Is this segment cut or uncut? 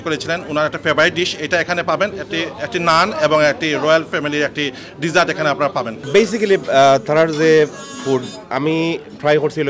uncut